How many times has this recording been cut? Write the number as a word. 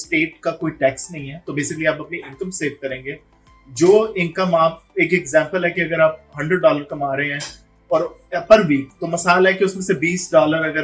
zero